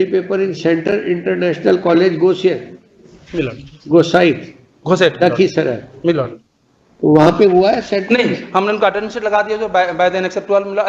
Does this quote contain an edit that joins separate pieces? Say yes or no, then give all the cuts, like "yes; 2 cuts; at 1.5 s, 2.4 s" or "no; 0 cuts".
no; 0 cuts